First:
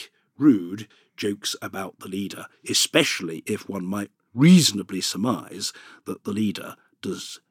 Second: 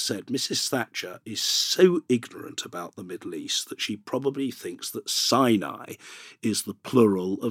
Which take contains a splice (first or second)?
first